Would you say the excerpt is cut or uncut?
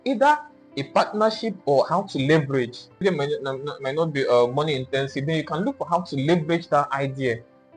cut